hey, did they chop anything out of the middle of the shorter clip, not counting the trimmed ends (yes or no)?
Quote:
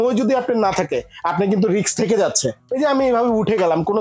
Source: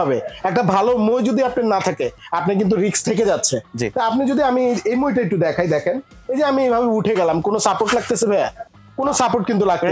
yes